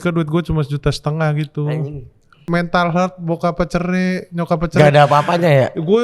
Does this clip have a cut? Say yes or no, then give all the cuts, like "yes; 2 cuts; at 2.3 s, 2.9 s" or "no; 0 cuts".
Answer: yes; 1 cut; at 2.4 s